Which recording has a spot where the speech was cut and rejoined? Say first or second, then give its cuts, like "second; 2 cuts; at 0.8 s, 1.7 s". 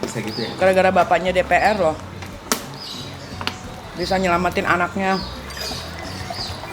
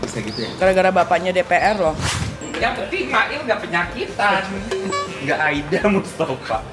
second; 1 cut; at 2.4 s